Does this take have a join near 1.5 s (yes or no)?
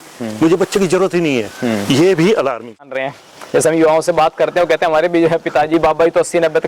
no